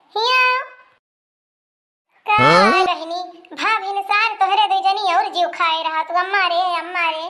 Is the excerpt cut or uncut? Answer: uncut